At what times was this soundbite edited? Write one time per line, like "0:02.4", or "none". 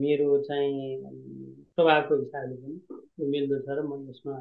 none